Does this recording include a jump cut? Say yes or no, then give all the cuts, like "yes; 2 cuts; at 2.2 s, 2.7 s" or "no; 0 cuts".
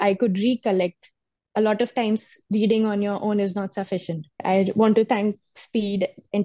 yes; 1 cut; at 4.4 s